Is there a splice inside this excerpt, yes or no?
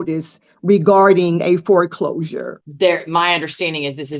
yes